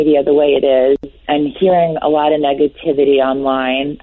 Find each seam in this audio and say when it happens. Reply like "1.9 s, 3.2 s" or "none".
1.1 s